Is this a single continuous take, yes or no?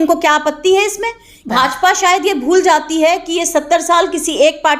no